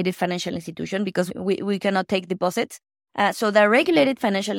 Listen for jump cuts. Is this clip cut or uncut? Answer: cut